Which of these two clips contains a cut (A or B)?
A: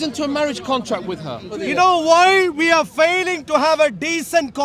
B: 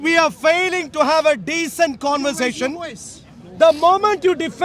A